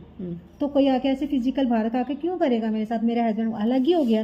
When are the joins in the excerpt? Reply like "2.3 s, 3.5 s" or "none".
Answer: none